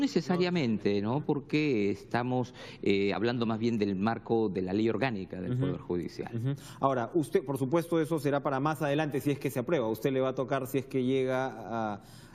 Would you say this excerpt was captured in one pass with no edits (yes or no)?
yes